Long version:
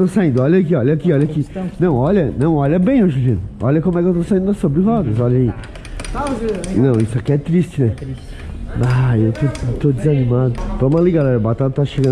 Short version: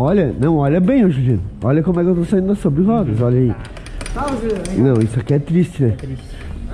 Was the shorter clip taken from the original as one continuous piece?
yes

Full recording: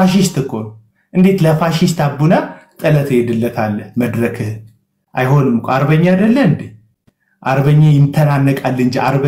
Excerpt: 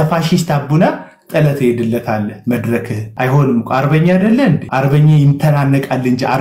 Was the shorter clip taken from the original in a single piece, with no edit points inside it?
no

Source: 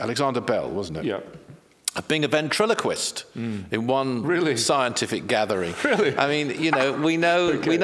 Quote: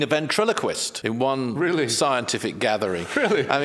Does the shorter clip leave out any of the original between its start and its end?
yes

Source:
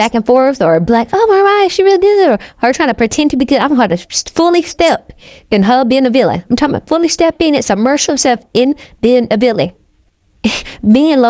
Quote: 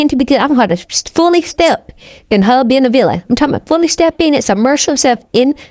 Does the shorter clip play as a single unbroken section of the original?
yes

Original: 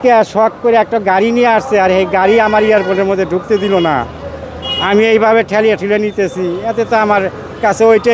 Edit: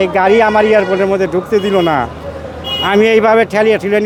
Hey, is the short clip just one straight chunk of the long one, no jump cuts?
yes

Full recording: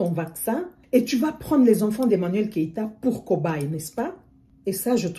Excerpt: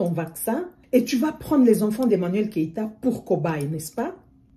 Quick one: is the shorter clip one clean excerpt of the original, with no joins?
yes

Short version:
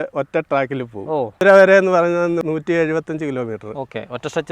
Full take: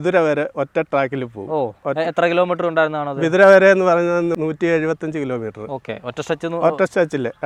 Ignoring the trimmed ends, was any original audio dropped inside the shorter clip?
yes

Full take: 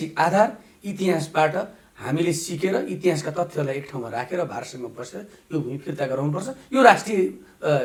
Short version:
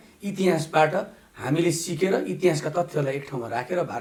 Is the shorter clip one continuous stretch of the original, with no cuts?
yes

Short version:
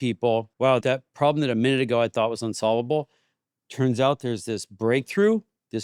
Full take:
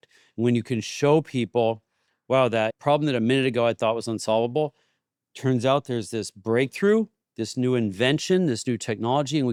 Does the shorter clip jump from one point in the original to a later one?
yes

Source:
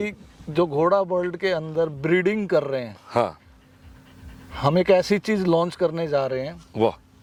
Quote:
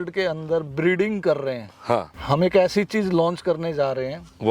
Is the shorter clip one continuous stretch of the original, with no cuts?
no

